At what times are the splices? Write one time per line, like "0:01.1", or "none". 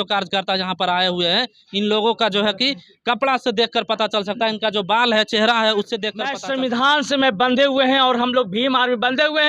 0:06.3